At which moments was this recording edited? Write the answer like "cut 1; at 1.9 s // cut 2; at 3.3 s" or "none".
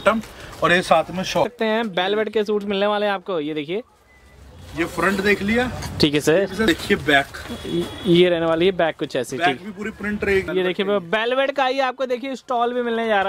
cut 1; at 1.4 s // cut 2; at 6.7 s // cut 3; at 10.5 s